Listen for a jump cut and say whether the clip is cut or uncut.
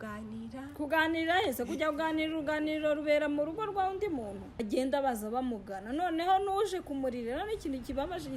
cut